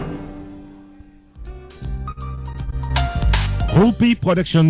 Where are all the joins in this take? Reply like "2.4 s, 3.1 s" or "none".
1.5 s